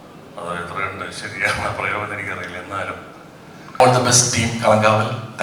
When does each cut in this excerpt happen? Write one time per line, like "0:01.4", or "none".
0:03.8